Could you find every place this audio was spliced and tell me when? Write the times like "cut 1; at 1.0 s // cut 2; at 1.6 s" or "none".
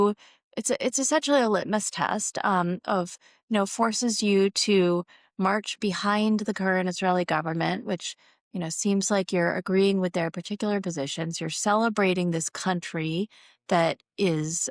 none